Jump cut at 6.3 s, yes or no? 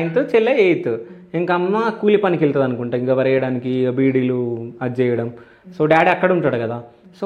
no